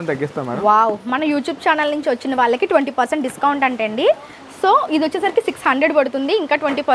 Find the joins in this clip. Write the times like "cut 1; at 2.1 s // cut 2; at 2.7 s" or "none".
none